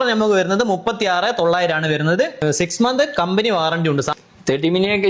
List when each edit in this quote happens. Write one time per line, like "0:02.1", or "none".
0:02.4
0:04.2